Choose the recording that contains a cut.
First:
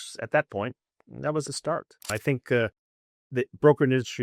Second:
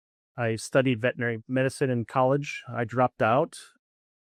first; 1 cut; at 2.1 s

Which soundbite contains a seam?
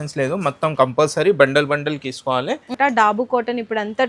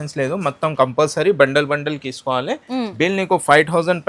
first; 1 cut; at 2.7 s

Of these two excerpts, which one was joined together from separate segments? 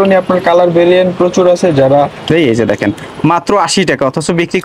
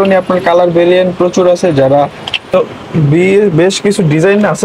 first; 1 cut; at 2.3 s

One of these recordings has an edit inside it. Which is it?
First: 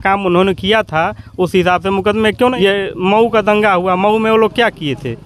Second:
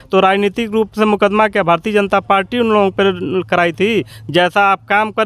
first; 1 cut; at 2.5 s

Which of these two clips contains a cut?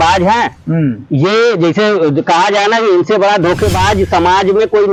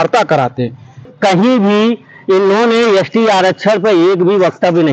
second; 1 cut; at 1.1 s

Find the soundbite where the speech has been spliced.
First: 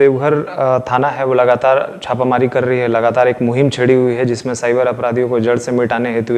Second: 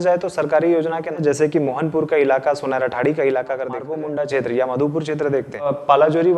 second; 3 cuts; at 1.1 s, 3.9 s, 5.7 s

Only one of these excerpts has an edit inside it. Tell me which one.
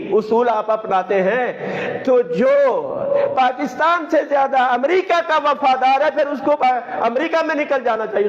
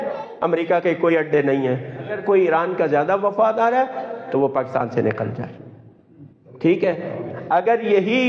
second; 1 cut; at 2.2 s

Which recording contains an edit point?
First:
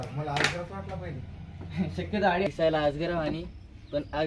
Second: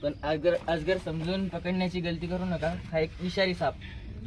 first; 1 cut; at 2.5 s

